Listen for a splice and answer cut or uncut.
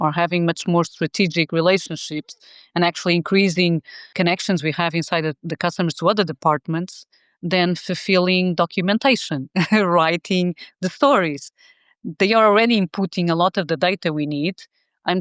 cut